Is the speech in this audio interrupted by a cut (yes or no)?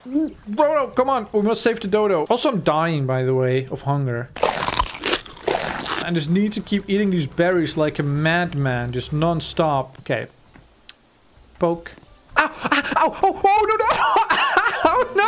yes